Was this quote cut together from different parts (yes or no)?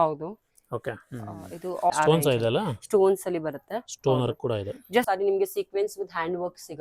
yes